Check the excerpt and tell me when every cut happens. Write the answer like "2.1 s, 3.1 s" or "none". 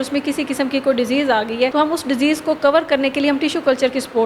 1.7 s